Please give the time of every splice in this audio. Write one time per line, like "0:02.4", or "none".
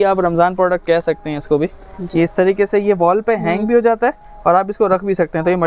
none